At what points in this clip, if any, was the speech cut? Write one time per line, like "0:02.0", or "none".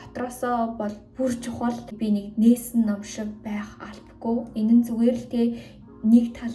0:01.9